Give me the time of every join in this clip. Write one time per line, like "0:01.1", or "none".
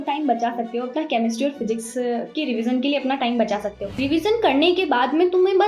0:03.9